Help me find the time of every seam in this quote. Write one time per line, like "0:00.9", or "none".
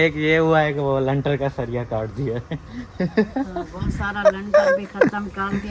none